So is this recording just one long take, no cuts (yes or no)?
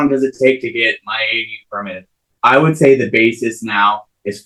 yes